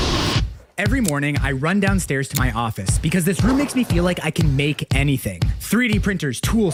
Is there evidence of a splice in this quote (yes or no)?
no